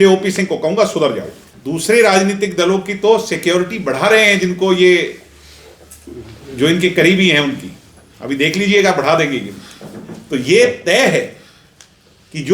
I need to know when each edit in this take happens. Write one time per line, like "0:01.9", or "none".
0:01.5